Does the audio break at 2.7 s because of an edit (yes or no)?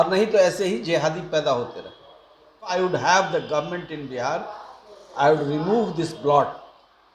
yes